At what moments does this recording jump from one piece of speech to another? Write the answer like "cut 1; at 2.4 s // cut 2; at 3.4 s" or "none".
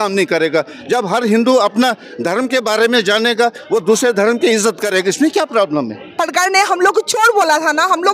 cut 1; at 6.1 s